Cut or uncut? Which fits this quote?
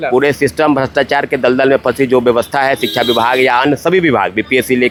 uncut